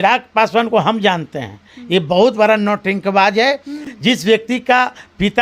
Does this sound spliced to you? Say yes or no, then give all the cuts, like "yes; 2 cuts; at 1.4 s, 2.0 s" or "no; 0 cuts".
no; 0 cuts